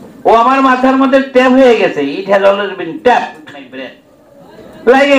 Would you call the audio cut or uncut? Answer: cut